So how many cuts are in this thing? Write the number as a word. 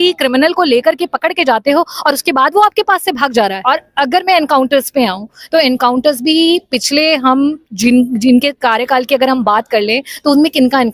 one